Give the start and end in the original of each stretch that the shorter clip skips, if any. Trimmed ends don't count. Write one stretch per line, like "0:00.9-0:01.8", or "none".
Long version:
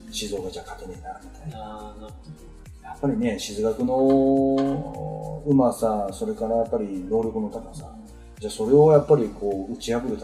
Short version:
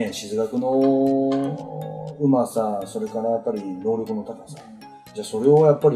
none